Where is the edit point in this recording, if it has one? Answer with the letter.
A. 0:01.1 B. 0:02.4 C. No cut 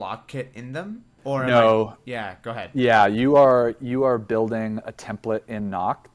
A